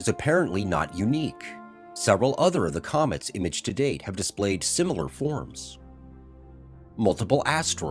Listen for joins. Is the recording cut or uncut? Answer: cut